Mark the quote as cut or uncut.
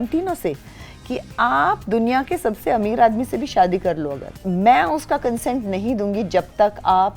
uncut